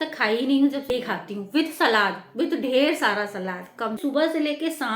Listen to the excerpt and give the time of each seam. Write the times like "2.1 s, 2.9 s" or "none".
1.1 s, 4.0 s